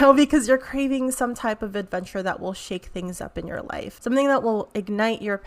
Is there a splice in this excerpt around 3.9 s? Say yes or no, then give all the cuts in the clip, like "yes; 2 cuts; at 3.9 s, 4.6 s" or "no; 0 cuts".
yes; 1 cut; at 3.9 s